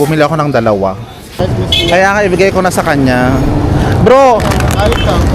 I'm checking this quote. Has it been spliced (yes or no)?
yes